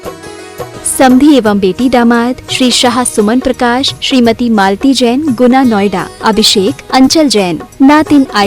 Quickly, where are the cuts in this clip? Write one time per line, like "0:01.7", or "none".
0:01.0